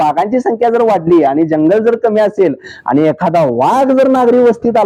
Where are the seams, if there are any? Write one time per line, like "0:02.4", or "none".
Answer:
none